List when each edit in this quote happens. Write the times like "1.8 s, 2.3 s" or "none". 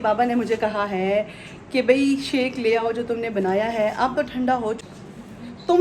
4.8 s